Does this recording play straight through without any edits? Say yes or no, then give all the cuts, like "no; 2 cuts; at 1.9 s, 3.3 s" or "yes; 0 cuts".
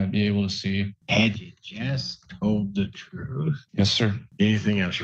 no; 2 cuts; at 0.9 s, 3.6 s